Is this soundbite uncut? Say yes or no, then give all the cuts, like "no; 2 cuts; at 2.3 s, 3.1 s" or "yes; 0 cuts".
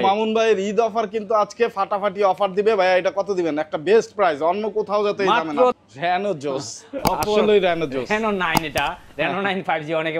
no; 1 cut; at 5.7 s